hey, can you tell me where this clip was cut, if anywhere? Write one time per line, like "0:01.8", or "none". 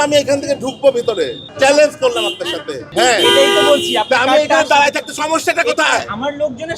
0:01.4
0:02.9